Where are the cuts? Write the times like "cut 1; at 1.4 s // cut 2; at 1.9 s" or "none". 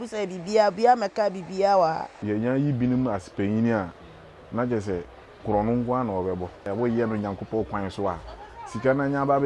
cut 1; at 2.1 s // cut 2; at 6.6 s